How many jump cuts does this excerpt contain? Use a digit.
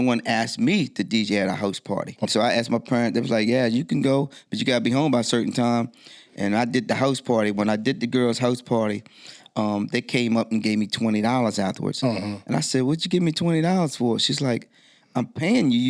1